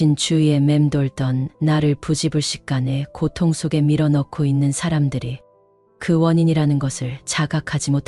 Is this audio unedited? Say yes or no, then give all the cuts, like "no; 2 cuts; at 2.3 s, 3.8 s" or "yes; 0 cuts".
yes; 0 cuts